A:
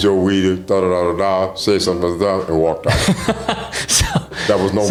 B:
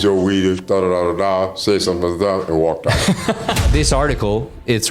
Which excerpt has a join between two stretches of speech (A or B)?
B